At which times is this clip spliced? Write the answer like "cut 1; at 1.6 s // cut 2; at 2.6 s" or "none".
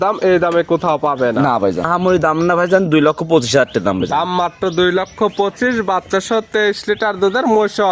cut 1; at 1.9 s